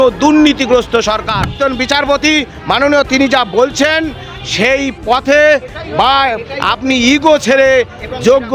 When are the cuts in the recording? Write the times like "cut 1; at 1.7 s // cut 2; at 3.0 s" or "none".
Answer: cut 1; at 1.5 s